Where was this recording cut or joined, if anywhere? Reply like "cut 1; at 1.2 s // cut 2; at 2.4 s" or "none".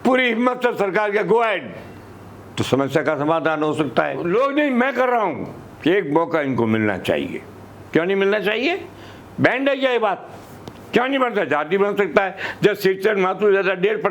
cut 1; at 4.2 s